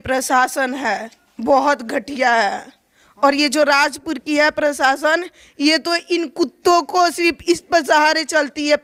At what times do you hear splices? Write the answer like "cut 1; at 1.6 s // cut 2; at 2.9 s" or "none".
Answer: none